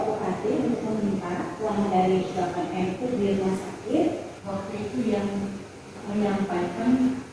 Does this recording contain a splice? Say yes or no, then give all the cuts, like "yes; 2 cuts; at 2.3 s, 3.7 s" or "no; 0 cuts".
yes; 1 cut; at 4.3 s